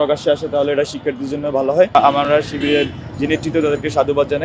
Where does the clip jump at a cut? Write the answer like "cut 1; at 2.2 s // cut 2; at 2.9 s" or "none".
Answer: cut 1; at 1.9 s